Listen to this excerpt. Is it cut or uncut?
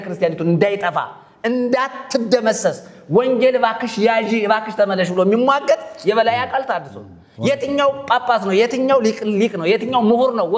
uncut